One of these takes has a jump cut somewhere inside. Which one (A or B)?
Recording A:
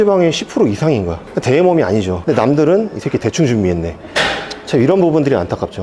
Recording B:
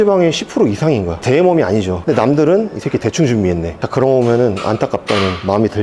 B